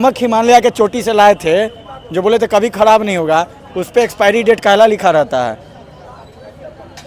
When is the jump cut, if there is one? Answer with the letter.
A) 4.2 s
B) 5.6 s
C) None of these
C